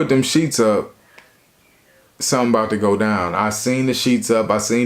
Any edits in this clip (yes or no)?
no